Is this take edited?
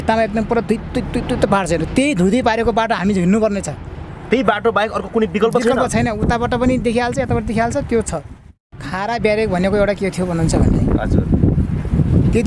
yes; 1 cut; at 8.7 s

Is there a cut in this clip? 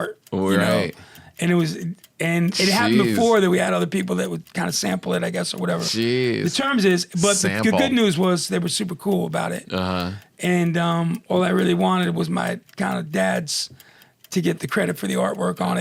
no; 0 cuts

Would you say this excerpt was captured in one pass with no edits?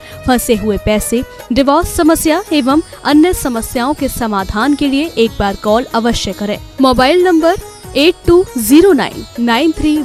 yes; 0 cuts

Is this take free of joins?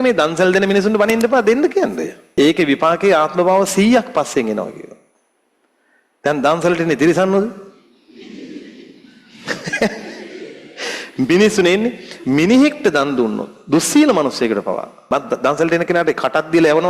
no; 2 cuts; at 2.1 s, 15.1 s

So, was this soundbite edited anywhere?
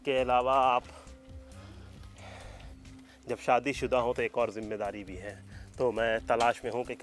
no; 0 cuts

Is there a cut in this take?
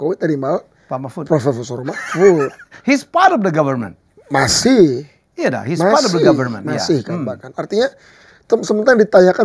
no; 0 cuts

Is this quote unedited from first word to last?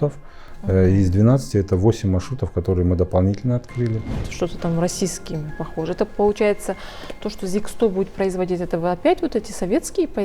no; 1 cut; at 4.1 s

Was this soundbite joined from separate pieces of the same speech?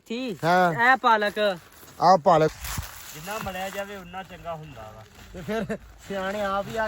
yes; 1 cut; at 2.5 s

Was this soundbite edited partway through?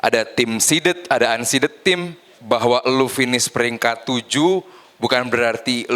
yes; 1 cut; at 2.3 s

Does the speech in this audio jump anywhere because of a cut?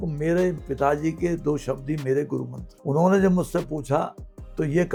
no; 0 cuts

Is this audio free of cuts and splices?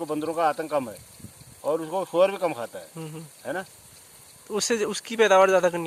yes; 0 cuts

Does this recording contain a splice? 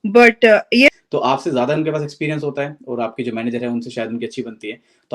yes; 1 cut; at 0.9 s

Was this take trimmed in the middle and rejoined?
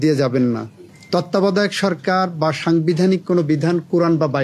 yes; 1 cut; at 0.9 s

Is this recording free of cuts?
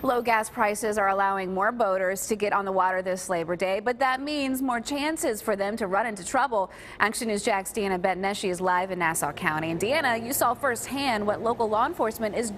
yes; 0 cuts

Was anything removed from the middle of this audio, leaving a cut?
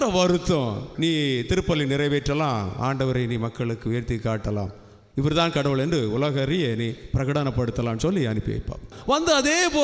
yes; 2 cuts; at 0.9 s, 8.9 s

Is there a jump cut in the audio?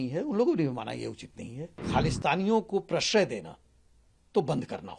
yes; 1 cut; at 1.9 s

